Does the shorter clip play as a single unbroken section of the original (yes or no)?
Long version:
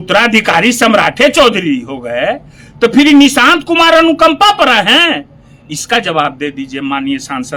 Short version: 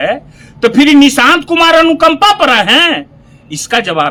yes